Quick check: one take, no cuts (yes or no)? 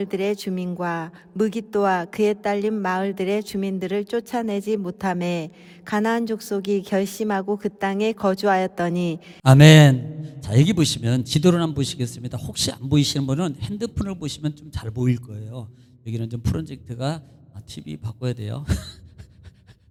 yes